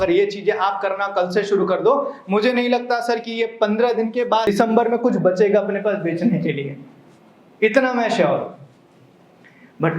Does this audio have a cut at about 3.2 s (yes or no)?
no